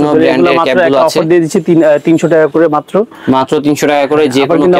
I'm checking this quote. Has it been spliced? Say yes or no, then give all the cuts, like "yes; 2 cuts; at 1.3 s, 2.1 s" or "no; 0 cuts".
no; 0 cuts